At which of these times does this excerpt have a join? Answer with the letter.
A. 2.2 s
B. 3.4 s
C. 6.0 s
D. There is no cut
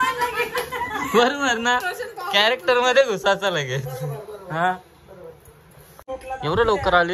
C